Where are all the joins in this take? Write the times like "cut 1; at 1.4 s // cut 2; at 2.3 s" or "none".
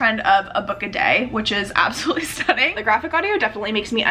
cut 1; at 2.8 s